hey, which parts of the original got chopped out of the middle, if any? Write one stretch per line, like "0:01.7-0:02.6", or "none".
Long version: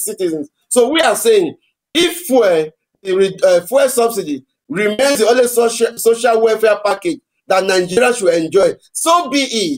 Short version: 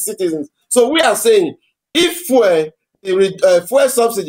none